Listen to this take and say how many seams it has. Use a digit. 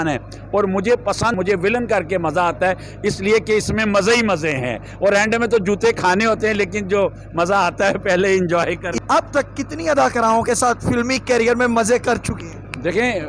2